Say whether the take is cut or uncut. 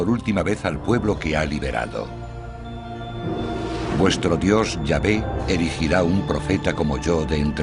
cut